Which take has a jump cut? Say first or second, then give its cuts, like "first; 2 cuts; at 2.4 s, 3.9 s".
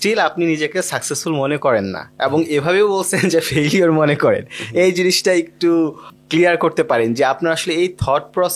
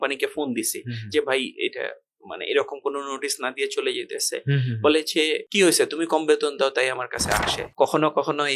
second; 1 cut; at 7.6 s